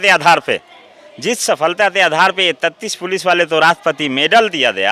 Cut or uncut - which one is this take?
uncut